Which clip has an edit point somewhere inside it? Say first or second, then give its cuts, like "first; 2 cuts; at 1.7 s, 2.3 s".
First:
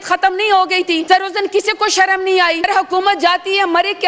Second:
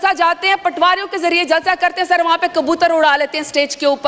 first; 2 cuts; at 1.0 s, 2.6 s